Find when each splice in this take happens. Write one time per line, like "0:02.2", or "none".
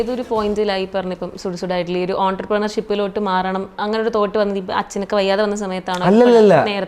none